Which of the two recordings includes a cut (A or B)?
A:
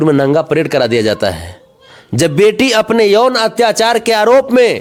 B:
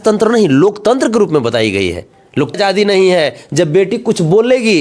B